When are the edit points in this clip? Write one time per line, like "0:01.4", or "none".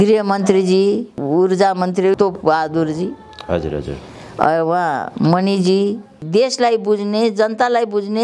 0:01.2
0:02.2
0:06.2